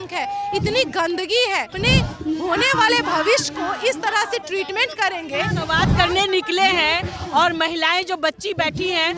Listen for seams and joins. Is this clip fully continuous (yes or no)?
no